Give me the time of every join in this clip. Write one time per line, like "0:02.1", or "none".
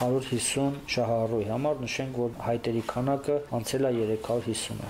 0:00.8
0:02.4
0:03.5

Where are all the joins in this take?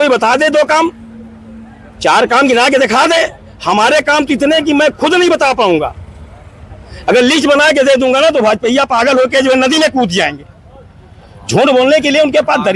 none

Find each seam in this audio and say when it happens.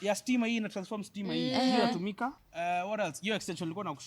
0:02.4

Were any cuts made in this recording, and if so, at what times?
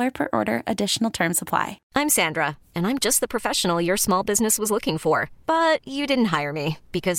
0:01.8

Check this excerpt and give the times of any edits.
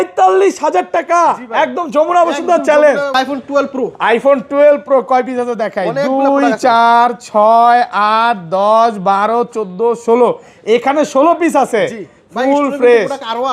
0:03.1

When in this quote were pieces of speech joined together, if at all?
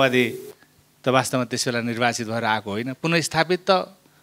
none

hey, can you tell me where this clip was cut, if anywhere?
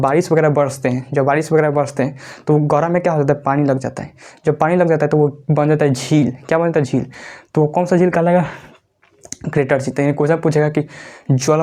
none

